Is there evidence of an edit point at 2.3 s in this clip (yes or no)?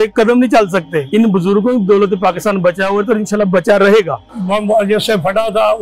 no